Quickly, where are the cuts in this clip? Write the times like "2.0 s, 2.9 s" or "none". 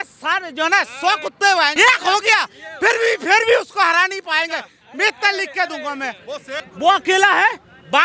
1.7 s, 6.6 s